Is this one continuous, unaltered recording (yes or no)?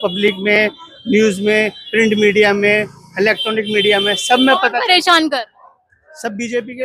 yes